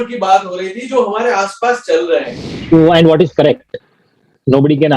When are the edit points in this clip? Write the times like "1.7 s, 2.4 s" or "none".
2.6 s